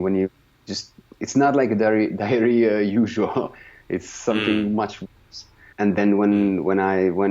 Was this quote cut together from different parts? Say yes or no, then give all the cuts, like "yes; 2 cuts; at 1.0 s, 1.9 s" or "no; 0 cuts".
yes; 1 cut; at 5.6 s